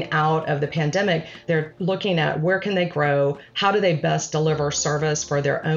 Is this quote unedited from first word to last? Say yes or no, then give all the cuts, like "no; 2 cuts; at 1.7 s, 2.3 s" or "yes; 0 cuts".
no; 1 cut; at 1.3 s